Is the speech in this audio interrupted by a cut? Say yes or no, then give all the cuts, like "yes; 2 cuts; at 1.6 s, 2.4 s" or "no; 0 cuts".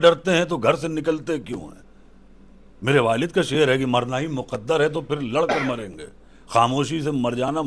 no; 0 cuts